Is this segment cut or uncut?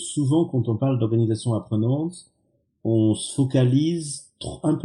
uncut